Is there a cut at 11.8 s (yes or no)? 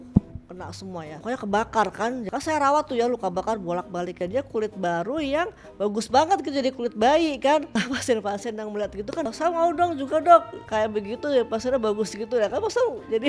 no